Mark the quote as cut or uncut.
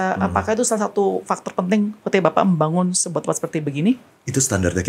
uncut